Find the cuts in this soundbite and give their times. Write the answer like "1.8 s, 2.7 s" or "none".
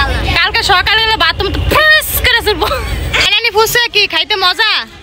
3.3 s